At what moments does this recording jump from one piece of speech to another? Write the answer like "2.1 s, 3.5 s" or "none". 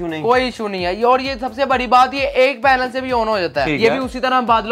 3.7 s

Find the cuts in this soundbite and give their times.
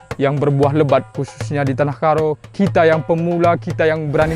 1.2 s

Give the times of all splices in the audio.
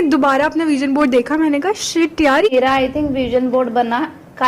2.5 s

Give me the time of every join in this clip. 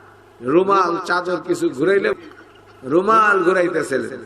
2.1 s

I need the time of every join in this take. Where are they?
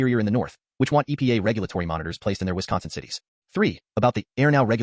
3.3 s

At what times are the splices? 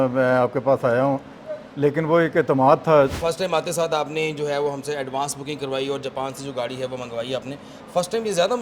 3.2 s

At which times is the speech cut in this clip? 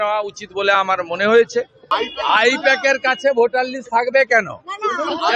1.9 s

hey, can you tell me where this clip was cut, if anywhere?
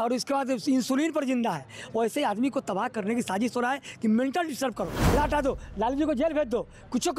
5.1 s

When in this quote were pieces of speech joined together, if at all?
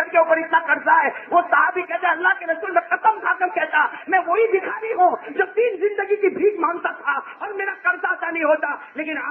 none

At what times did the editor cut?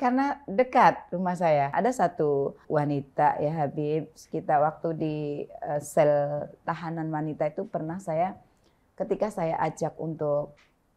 1.7 s

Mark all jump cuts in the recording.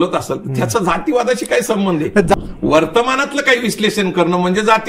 2.3 s

